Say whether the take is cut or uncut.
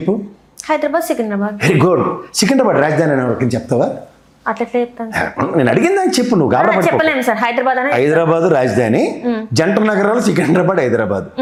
uncut